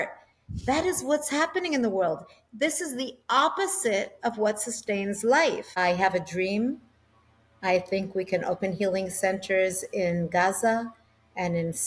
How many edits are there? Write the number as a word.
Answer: one